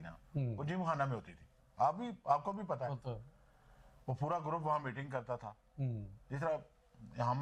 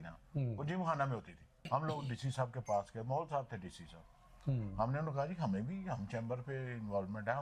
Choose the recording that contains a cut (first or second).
second